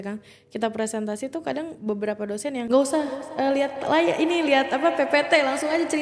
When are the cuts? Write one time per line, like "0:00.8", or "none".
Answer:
0:02.7